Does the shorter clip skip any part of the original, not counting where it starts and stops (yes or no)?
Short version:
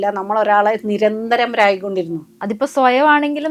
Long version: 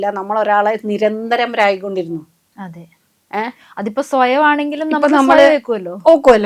yes